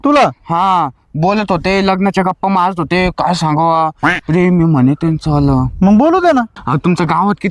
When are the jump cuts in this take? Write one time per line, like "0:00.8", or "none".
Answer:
0:06.6